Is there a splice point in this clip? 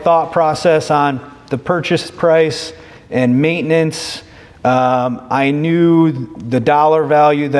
no; 0 cuts

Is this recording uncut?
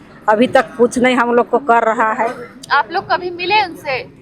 yes; 0 cuts

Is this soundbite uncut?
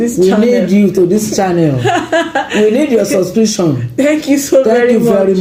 yes; 0 cuts

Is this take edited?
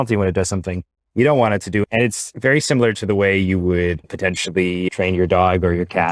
yes; 2 cuts; at 2.1 s, 4.9 s

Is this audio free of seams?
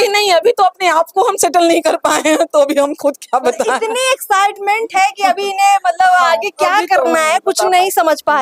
yes; 0 cuts

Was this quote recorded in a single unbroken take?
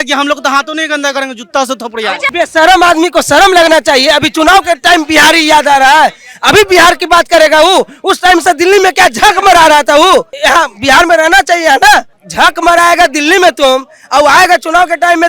no; 3 cuts; at 2.3 s, 10.3 s, 12.2 s

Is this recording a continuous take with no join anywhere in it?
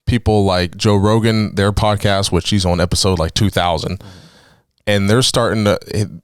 yes; 0 cuts

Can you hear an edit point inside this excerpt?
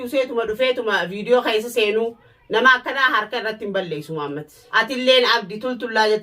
yes; 1 cut; at 4.6 s

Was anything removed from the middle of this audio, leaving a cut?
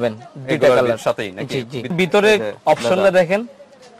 yes; 1 cut; at 1.9 s

